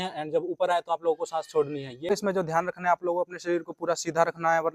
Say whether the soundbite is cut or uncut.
cut